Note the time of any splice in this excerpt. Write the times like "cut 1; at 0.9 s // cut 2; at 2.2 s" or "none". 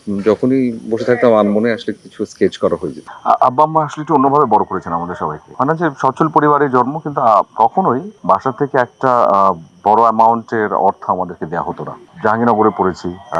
cut 1; at 3.1 s